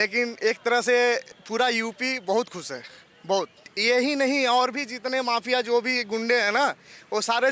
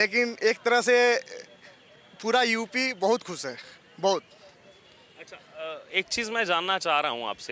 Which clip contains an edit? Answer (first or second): first